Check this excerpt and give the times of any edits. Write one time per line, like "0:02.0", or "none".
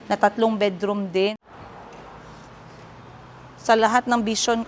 0:01.4